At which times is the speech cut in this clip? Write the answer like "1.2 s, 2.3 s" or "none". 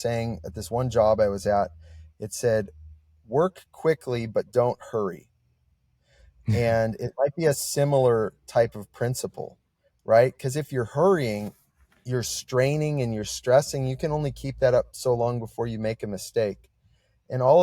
none